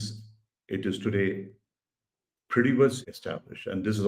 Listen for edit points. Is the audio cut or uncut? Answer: cut